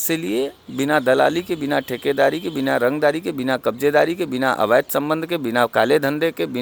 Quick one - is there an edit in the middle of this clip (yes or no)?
no